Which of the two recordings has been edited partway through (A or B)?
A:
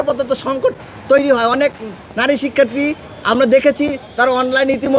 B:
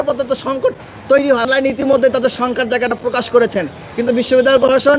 B